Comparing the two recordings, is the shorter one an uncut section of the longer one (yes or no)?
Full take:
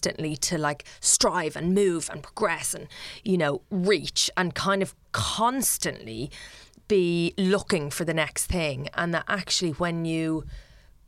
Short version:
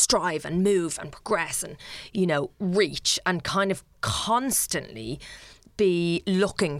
yes